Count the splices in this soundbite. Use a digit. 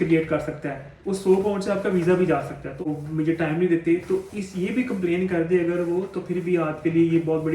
1